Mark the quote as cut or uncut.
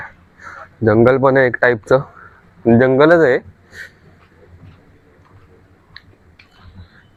uncut